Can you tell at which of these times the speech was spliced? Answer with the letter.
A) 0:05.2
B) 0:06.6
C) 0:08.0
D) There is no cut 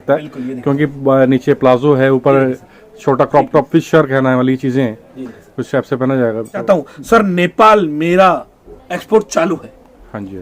B